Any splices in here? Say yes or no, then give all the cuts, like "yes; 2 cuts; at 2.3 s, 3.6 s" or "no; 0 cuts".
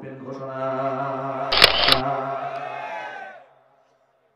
yes; 1 cut; at 1.9 s